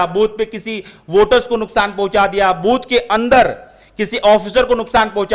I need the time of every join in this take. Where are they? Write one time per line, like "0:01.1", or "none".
none